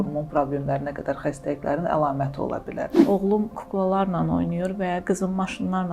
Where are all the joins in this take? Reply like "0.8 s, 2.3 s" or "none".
2.9 s